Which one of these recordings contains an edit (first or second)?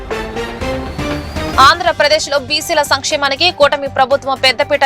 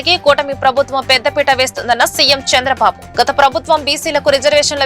first